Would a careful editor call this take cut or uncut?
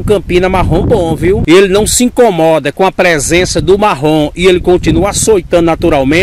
cut